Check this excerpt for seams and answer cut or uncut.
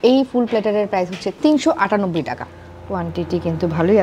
cut